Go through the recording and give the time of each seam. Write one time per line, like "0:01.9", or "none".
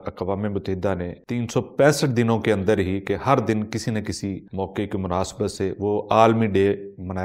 0:01.2
0:04.4